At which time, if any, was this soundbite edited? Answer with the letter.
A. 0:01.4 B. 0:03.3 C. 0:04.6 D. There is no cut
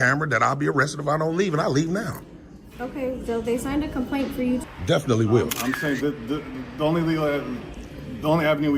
C